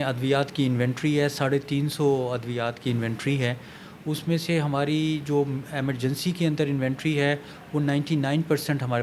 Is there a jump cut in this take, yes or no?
no